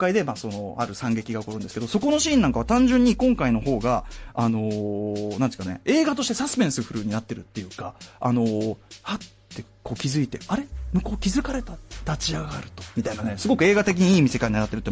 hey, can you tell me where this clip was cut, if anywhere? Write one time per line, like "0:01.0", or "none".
0:07.8